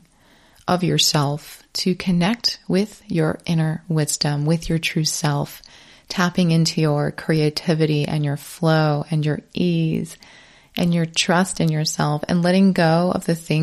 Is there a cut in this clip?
no; 0 cuts

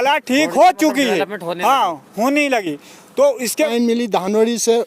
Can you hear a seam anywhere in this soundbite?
yes; 1 cut; at 3.7 s

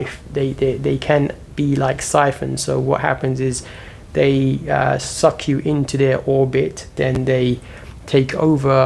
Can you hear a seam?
yes; 1 cut; at 6.9 s

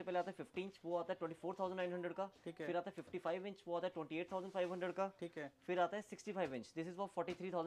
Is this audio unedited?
yes; 0 cuts

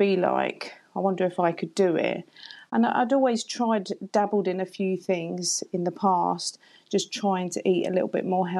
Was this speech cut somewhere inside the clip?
no; 0 cuts

